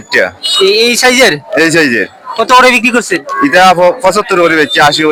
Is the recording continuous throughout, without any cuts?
yes; 0 cuts

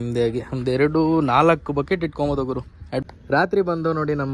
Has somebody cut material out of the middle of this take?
yes; 1 cut; at 3.0 s

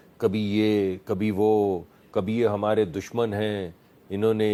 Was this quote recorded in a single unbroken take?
yes; 0 cuts

